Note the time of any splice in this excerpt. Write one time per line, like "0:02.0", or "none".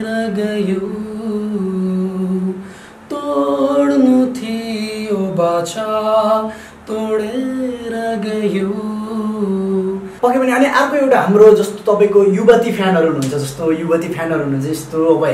0:10.1